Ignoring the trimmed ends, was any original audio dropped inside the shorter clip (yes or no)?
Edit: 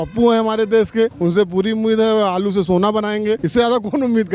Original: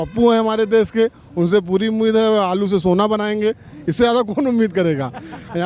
yes